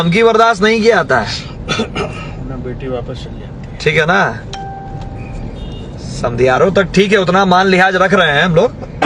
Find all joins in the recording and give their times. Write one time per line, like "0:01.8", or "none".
none